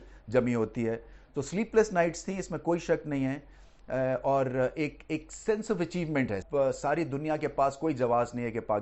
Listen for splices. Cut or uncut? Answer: cut